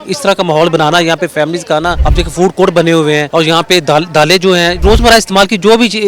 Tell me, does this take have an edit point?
yes; 3 cuts; at 2.0 s, 3.3 s, 4.8 s

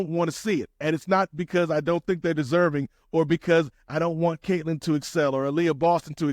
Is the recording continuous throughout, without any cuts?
yes; 0 cuts

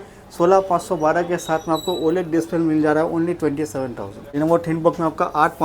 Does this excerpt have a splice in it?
yes; 1 cut; at 4.2 s

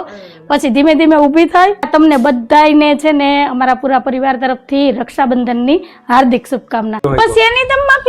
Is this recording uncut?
no; 2 cuts; at 1.9 s, 7.1 s

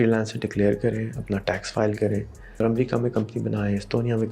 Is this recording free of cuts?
no; 1 cut; at 2.6 s

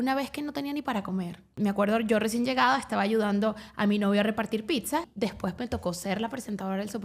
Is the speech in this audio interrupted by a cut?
yes; 2 cuts; at 1.5 s, 5.1 s

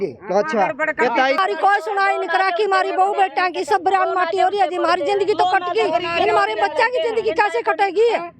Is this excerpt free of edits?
no; 1 cut; at 1.4 s

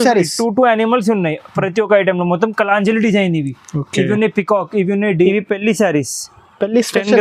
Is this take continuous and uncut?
no; 1 cut; at 5.1 s

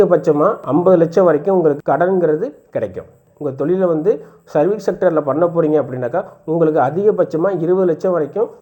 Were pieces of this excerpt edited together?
no; 0 cuts

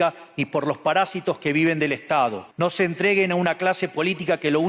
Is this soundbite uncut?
no; 1 cut; at 2.5 s

